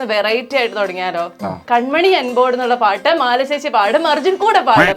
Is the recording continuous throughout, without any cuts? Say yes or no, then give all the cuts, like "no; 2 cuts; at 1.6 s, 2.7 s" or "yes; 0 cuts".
no; 1 cut; at 1.6 s